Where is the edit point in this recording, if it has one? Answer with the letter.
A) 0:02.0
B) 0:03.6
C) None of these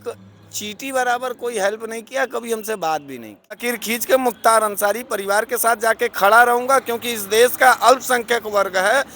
B